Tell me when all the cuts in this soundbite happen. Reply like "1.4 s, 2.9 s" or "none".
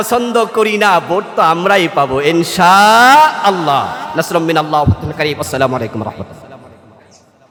none